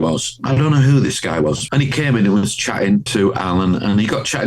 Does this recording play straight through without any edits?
no; 2 cuts; at 1.6 s, 3.1 s

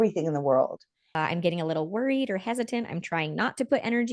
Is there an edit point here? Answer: yes; 1 cut; at 1.1 s

